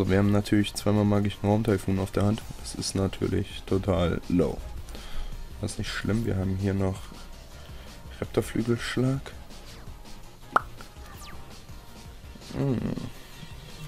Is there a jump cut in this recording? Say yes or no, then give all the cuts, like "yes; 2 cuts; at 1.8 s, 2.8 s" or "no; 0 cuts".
no; 0 cuts